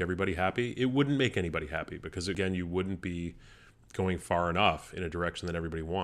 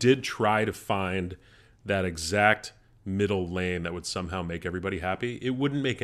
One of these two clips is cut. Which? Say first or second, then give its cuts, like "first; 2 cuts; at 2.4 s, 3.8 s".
first; 1 cut; at 2.3 s